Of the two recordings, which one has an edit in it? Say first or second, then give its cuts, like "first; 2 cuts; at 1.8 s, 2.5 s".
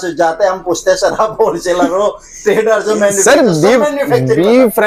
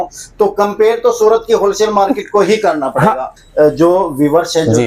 second; 1 cut; at 3.4 s